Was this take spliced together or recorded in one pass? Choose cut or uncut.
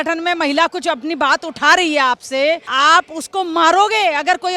cut